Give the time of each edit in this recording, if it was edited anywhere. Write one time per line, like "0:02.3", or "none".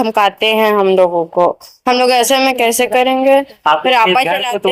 none